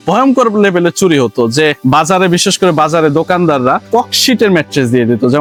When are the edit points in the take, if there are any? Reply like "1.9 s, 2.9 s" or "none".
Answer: none